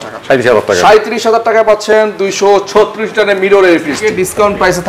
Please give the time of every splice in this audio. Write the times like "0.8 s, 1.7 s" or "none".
4.0 s